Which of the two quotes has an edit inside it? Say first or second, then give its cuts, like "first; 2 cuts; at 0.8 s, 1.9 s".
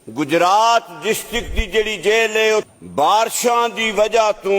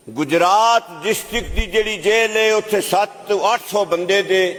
first; 1 cut; at 2.7 s